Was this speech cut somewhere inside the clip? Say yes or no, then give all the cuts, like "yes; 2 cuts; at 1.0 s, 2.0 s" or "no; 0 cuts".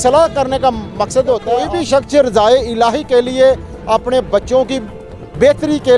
yes; 1 cut; at 1.7 s